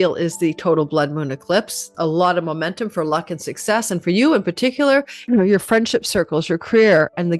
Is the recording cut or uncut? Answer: cut